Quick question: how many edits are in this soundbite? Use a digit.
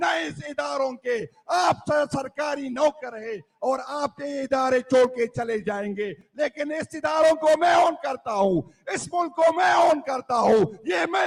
0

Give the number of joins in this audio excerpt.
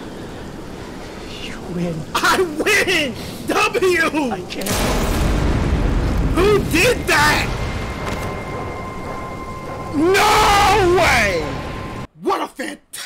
1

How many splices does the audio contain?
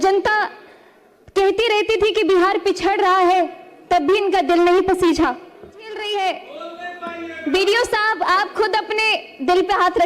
1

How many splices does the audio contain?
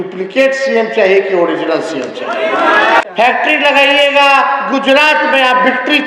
1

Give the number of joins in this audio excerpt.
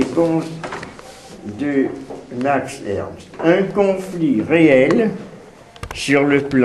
1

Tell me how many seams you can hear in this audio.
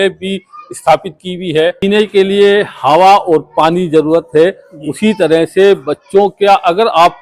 1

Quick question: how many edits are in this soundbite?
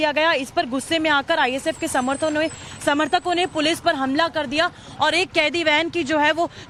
0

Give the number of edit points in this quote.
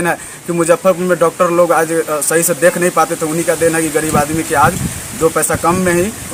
0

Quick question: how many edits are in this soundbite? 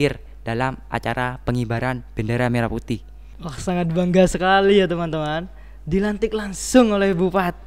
1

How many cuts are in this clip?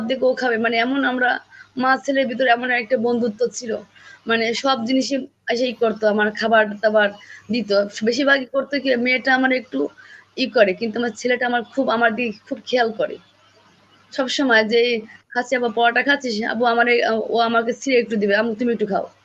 0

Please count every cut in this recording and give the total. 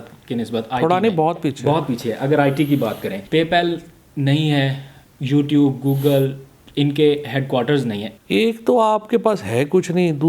2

